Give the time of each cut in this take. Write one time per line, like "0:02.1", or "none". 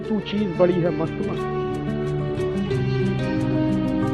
none